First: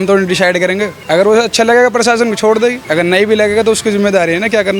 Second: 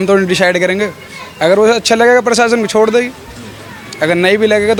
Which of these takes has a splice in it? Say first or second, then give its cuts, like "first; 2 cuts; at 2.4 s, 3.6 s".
first; 2 cuts; at 0.9 s, 2.8 s